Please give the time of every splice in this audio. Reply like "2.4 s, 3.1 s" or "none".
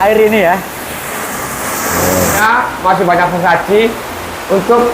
2.4 s